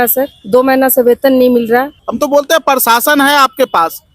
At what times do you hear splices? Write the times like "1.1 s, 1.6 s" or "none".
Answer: 2.0 s